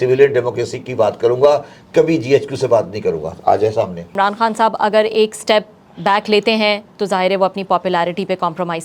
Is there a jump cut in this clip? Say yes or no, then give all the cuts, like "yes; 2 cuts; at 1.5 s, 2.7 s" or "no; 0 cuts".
yes; 1 cut; at 4.1 s